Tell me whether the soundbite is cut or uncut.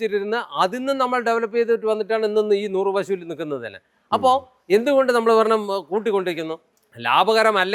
uncut